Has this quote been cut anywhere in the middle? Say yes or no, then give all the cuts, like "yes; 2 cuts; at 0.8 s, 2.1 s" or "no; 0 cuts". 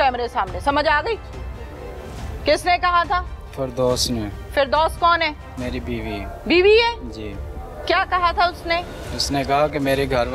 no; 0 cuts